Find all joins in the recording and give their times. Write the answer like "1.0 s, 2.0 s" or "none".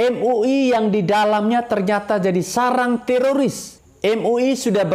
3.8 s